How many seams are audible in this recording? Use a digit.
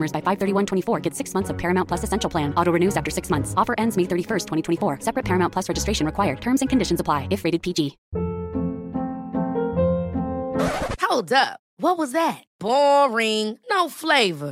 1